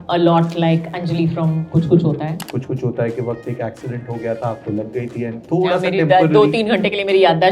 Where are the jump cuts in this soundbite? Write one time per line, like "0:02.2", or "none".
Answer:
0:02.5